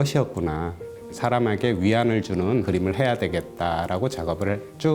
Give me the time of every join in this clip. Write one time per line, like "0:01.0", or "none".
0:01.0
0:02.7